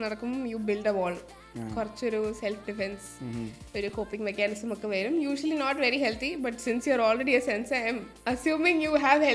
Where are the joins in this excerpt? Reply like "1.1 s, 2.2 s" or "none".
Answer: none